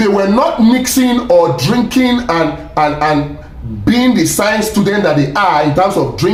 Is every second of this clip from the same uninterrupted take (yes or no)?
yes